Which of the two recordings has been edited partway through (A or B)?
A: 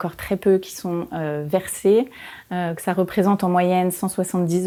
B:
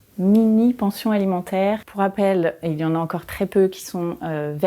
B